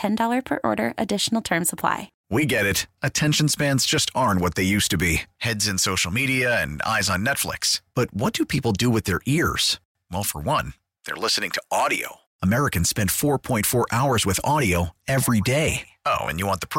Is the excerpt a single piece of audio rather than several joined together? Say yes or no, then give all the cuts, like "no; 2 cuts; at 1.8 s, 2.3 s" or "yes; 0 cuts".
no; 1 cut; at 2.1 s